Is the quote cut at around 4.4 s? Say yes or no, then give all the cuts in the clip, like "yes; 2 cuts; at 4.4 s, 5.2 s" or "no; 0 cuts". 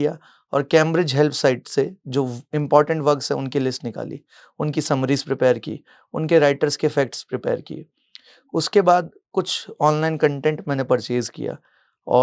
no; 0 cuts